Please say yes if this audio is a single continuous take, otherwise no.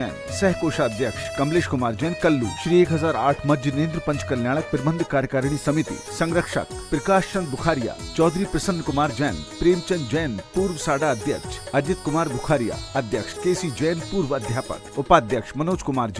yes